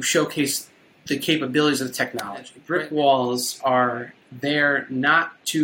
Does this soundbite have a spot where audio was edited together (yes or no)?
yes